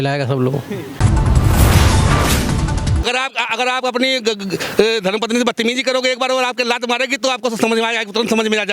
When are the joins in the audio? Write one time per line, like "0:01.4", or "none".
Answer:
0:01.0
0:03.0